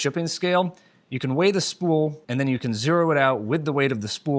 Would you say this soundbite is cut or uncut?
uncut